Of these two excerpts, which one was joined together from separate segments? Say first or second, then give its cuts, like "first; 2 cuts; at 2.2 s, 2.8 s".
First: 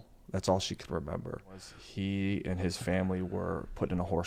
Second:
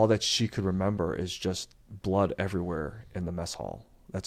first; 1 cut; at 1.8 s